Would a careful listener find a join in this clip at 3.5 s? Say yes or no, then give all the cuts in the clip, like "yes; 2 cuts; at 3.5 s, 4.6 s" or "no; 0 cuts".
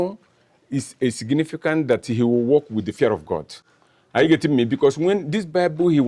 no; 0 cuts